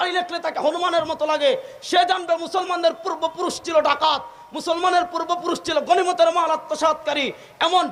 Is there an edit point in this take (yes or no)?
no